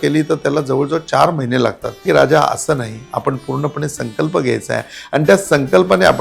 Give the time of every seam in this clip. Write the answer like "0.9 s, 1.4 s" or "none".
2.0 s